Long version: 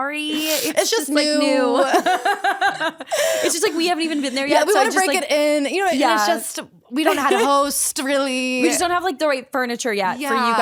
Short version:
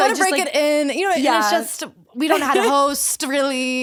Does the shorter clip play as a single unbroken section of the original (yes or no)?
yes